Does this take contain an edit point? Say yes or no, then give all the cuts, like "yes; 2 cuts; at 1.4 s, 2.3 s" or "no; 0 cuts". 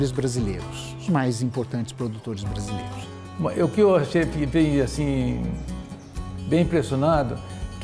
yes; 1 cut; at 2.9 s